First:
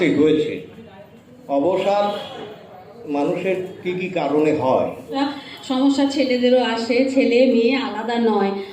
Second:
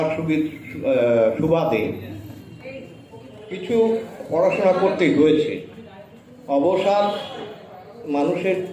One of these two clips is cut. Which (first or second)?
first